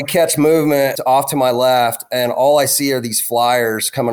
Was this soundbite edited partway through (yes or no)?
yes